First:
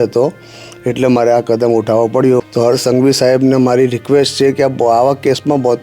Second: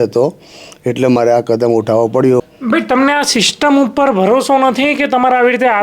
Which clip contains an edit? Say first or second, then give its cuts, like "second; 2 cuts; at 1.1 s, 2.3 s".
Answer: first; 1 cut; at 2.5 s